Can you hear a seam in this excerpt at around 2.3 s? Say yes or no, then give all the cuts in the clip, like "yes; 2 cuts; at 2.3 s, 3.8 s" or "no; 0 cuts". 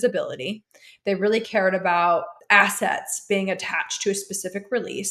yes; 1 cut; at 2.3 s